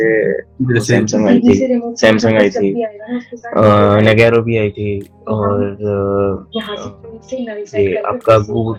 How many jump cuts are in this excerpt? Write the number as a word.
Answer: zero